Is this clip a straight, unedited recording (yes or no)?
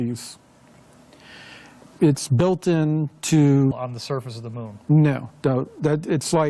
yes